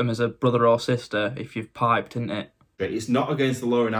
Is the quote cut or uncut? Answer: cut